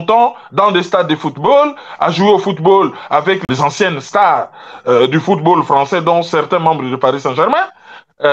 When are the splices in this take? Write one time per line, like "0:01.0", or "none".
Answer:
none